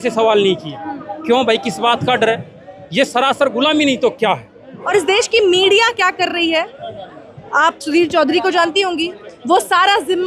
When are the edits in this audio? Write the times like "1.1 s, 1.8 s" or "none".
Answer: 4.7 s